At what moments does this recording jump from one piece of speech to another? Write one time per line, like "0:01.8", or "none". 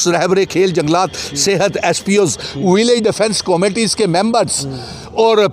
none